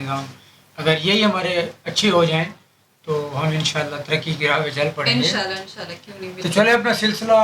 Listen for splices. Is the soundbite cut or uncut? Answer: uncut